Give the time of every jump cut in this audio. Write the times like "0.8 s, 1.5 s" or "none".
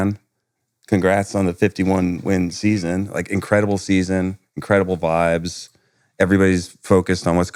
none